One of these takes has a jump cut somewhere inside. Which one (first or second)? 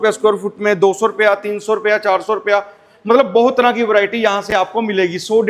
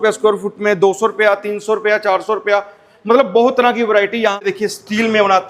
second